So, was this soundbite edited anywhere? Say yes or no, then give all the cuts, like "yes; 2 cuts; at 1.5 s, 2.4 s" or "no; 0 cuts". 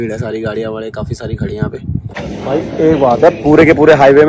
yes; 1 cut; at 2.1 s